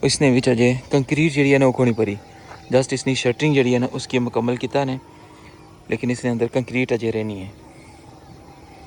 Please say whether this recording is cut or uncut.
uncut